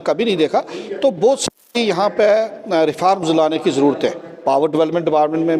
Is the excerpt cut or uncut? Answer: uncut